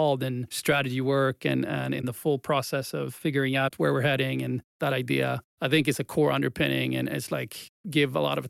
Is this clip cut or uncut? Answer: uncut